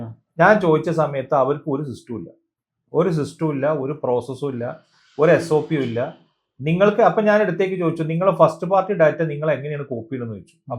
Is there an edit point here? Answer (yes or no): no